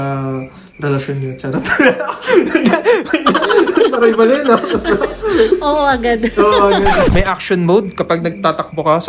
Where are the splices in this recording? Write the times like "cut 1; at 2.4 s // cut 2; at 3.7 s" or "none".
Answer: cut 1; at 7.1 s